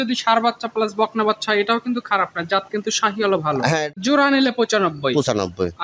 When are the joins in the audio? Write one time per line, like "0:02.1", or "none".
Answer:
0:03.9